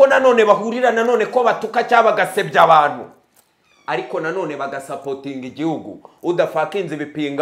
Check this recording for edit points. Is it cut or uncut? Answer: uncut